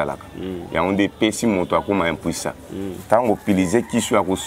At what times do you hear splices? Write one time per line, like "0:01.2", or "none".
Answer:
none